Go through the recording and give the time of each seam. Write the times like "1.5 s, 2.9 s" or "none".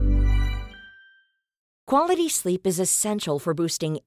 1.7 s